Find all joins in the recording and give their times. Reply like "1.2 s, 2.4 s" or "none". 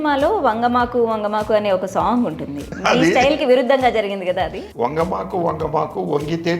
2.7 s, 4.6 s

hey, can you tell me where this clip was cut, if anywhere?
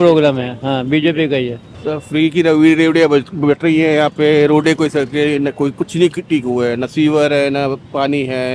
1.7 s

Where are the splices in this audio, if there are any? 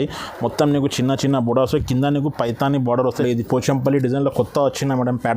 3.2 s

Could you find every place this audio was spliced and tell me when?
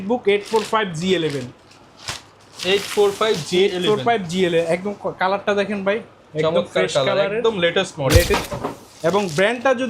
8.3 s

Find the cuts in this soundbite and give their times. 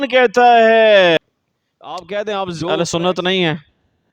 1.2 s

